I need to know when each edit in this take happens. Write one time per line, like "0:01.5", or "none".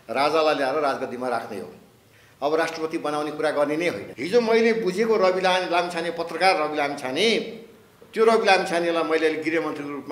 0:04.1